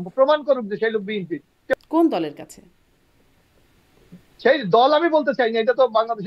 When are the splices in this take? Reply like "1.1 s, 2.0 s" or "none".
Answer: 1.8 s